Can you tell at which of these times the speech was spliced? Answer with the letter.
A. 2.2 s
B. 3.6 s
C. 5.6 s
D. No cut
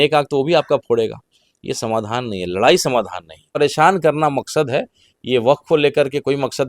B